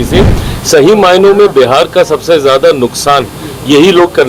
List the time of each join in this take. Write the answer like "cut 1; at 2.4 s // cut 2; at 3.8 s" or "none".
none